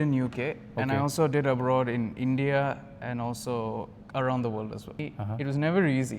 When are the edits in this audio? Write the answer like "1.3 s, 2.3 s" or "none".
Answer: 5.0 s